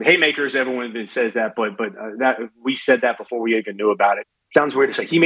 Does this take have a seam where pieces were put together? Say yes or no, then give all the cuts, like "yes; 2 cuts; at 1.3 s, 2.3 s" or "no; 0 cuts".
yes; 1 cut; at 4.3 s